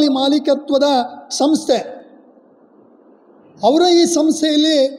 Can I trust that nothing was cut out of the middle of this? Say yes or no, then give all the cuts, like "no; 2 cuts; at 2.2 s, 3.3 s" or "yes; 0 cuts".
yes; 0 cuts